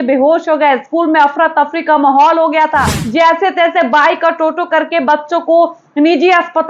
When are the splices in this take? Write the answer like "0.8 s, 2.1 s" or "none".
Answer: 3.0 s